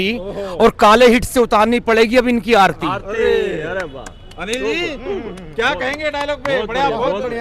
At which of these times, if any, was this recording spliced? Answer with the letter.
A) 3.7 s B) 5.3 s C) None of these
C